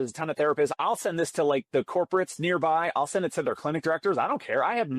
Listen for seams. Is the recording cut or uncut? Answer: uncut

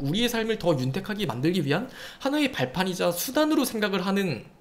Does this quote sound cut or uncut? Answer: uncut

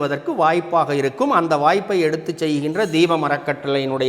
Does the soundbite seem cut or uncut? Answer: uncut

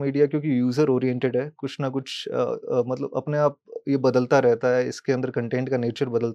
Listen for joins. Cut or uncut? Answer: uncut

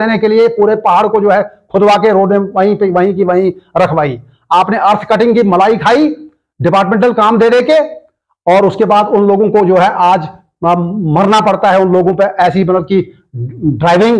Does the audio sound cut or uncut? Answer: uncut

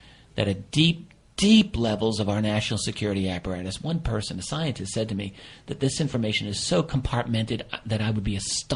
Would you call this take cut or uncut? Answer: uncut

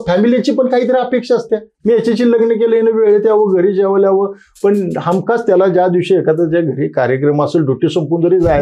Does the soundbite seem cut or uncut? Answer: uncut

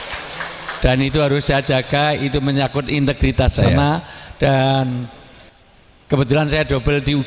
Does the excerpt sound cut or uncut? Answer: cut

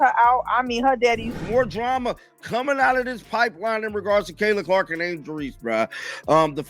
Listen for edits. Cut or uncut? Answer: cut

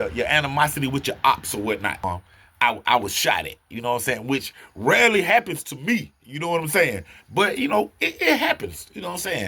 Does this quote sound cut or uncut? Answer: cut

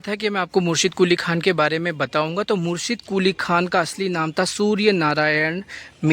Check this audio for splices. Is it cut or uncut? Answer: uncut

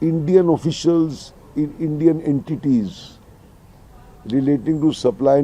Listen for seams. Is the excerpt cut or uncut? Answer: uncut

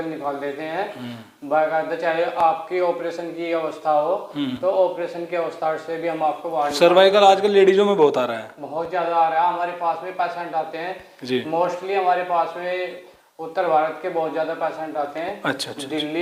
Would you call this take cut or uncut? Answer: uncut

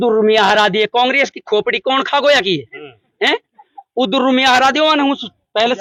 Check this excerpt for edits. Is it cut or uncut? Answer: uncut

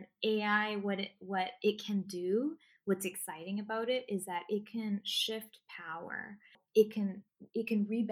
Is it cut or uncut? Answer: uncut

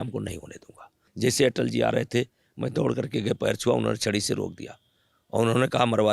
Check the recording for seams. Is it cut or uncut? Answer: cut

